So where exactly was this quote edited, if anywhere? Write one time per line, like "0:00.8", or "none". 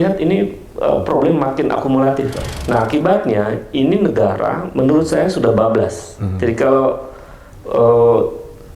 0:02.4